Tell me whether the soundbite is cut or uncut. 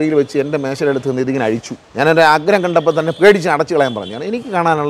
cut